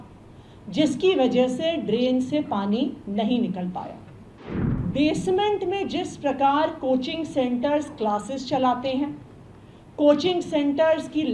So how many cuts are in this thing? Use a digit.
1